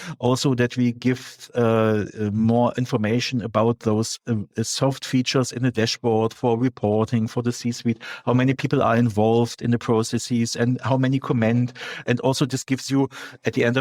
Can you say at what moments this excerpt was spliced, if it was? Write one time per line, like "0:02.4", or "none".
none